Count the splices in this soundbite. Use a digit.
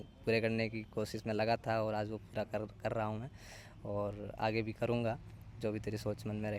0